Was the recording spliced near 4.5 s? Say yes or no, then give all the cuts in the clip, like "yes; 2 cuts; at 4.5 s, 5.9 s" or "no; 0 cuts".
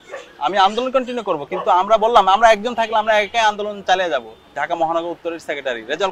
yes; 1 cut; at 4.5 s